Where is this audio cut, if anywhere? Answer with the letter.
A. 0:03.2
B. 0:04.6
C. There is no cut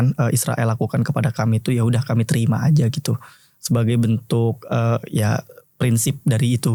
C